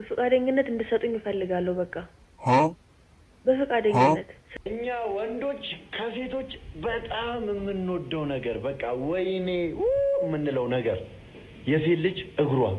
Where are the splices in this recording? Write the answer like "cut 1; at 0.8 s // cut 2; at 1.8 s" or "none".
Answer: cut 1; at 4.4 s